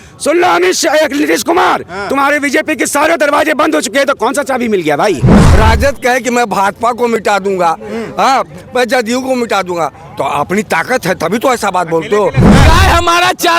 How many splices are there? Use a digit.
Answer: 2